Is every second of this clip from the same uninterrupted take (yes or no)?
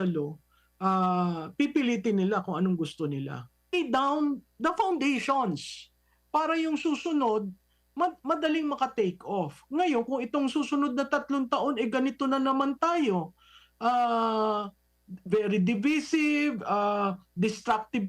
no